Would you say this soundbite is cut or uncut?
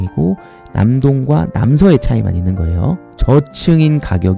cut